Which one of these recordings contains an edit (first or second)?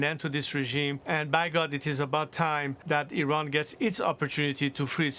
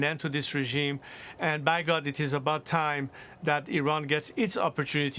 first